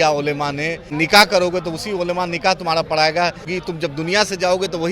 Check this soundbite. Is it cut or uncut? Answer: cut